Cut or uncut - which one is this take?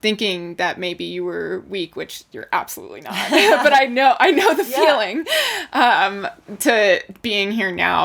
uncut